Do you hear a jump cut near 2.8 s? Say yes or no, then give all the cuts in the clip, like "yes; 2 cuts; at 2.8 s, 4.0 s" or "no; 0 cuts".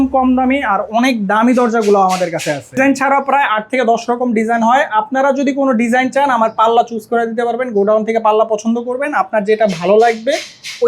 yes; 1 cut; at 2.8 s